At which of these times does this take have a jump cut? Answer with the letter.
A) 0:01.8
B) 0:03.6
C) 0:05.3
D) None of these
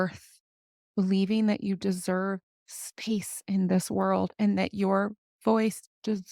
D